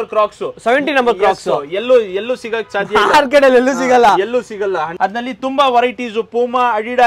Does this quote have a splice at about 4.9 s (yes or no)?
yes